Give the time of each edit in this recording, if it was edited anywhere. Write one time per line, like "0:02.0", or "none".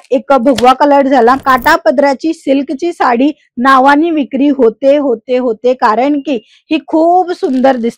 0:01.4